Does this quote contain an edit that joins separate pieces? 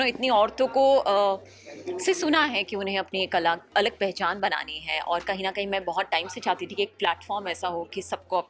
no; 0 cuts

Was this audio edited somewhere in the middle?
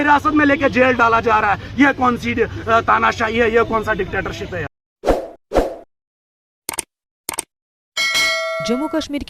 no; 0 cuts

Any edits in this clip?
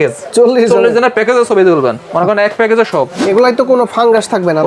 yes; 1 cut; at 3.2 s

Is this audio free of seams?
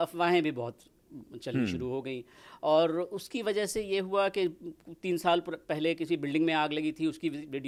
yes; 0 cuts

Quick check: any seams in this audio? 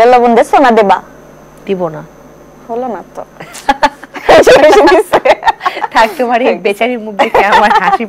no; 0 cuts

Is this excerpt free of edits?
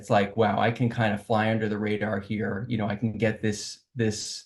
yes; 0 cuts

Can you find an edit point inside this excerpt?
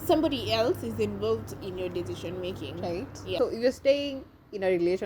yes; 1 cut; at 3.4 s

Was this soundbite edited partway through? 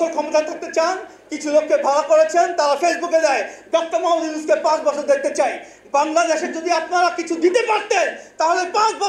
no; 0 cuts

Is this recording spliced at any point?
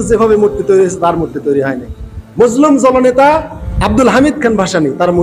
yes; 1 cut; at 3.6 s

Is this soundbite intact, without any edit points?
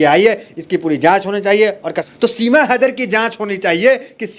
no; 1 cut; at 1.9 s

